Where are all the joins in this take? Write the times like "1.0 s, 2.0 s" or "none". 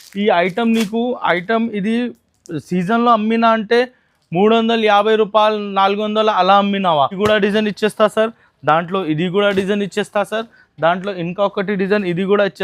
7.2 s